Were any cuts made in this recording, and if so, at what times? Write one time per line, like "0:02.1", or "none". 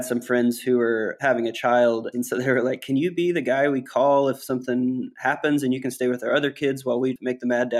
0:01.1
0:02.1

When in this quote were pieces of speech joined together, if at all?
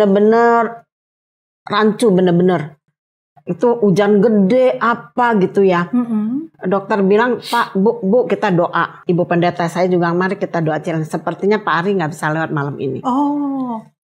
0:09.0

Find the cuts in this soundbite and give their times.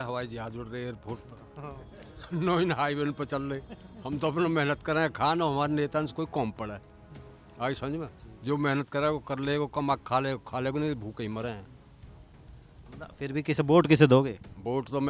none

